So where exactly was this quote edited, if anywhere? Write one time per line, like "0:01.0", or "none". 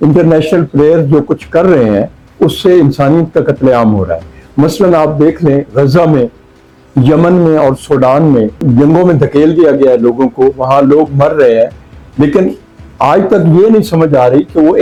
none